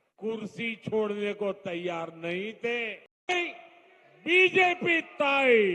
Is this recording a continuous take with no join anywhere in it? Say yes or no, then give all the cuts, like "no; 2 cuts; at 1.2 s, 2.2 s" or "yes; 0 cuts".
no; 1 cut; at 3.1 s